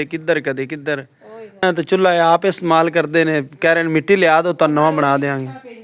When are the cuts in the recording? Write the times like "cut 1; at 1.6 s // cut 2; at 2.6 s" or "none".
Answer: cut 1; at 1.6 s